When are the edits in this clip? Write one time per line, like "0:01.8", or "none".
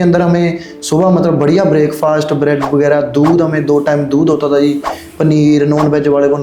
none